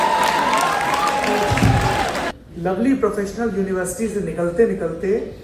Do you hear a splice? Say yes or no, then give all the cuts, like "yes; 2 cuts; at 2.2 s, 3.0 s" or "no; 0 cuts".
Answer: yes; 1 cut; at 2.3 s